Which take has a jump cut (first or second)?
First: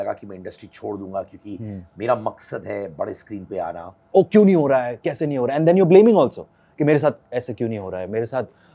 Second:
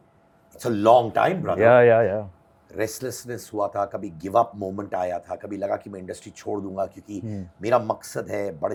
first